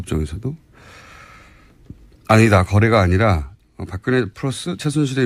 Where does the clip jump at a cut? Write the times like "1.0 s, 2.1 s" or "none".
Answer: none